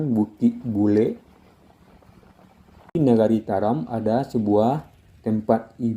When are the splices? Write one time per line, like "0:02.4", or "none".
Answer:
0:02.9